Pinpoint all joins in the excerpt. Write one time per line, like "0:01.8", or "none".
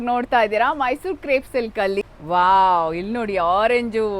0:02.1